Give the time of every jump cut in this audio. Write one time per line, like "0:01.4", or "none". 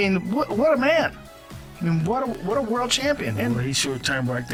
none